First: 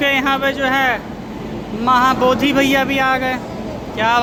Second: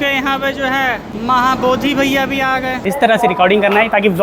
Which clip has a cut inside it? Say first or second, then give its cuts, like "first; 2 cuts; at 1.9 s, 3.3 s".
second; 2 cuts; at 1.1 s, 2.8 s